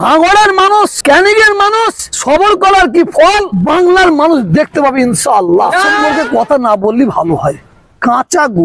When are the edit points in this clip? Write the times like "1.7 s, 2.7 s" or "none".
1.0 s, 2.1 s, 3.5 s, 6.0 s